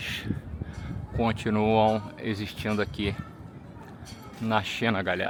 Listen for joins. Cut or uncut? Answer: uncut